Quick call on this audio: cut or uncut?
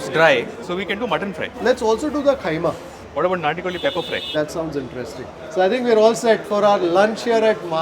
cut